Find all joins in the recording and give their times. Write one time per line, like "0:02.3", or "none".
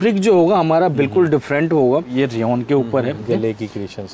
0:02.1
0:03.2